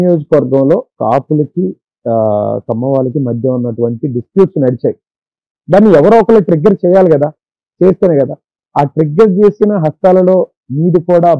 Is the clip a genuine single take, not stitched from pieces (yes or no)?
no